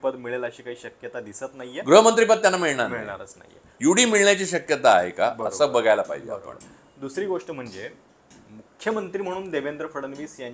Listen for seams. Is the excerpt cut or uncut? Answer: uncut